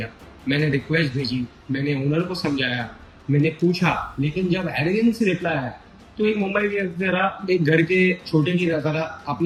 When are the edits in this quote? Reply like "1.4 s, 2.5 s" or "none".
none